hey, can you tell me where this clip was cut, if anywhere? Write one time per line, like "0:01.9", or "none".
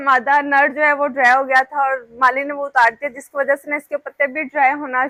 none